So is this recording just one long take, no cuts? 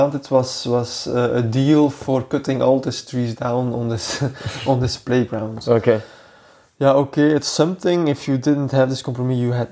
yes; 0 cuts

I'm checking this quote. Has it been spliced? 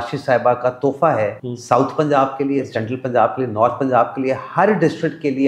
yes; 1 cut; at 1.5 s

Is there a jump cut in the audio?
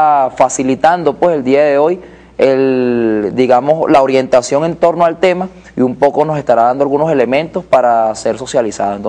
yes; 1 cut; at 1.9 s

